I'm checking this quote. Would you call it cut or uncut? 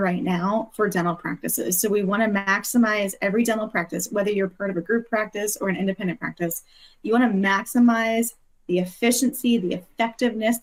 uncut